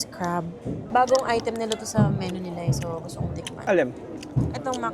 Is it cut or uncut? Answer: cut